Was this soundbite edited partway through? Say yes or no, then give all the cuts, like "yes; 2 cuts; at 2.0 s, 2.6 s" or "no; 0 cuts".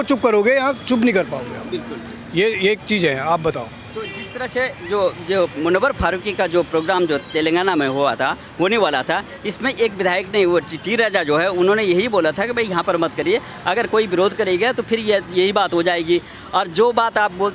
no; 0 cuts